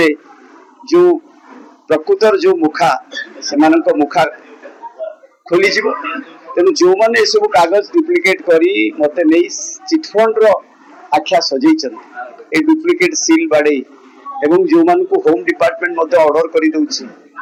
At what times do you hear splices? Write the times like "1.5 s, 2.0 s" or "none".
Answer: none